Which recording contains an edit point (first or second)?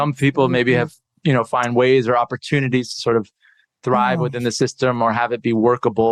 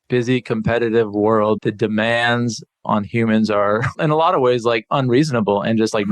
second